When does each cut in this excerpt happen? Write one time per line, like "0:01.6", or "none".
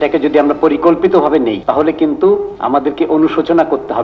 0:01.6
0:02.5